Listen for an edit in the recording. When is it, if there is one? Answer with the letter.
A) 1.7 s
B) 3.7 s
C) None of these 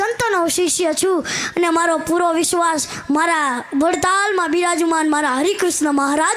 C